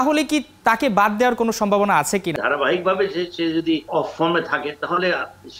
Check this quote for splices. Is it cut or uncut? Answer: cut